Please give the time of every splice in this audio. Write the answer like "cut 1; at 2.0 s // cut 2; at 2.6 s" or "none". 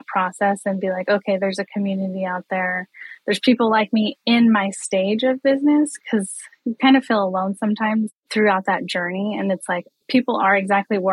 cut 1; at 6.0 s // cut 2; at 8.1 s // cut 3; at 9.9 s